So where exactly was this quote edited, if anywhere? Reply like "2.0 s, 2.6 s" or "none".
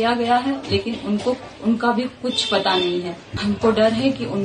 3.2 s